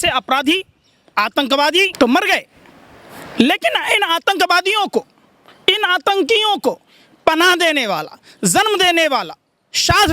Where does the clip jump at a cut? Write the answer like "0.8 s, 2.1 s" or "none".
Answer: 1.9 s